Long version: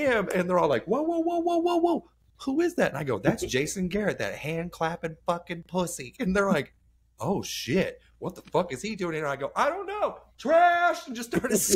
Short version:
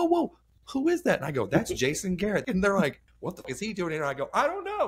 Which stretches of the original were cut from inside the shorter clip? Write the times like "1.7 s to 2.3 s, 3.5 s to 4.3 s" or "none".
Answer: 4.2 s to 6.2 s, 7.2 s to 8.7 s

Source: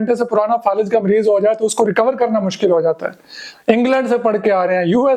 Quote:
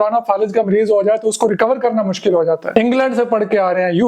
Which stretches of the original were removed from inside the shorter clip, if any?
3.0 s to 3.6 s

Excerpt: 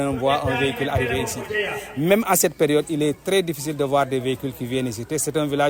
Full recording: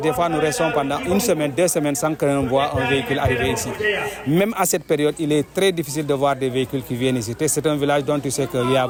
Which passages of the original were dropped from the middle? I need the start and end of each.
none

